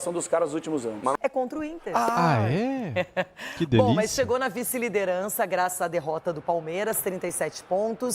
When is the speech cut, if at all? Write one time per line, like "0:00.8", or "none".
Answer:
0:01.1